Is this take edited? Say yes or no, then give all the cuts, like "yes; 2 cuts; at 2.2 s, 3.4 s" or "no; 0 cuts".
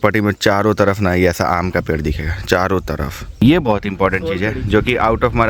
yes; 1 cut; at 3.4 s